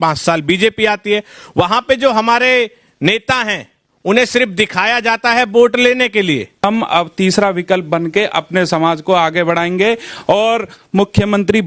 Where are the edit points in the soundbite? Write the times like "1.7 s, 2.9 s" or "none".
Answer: 6.6 s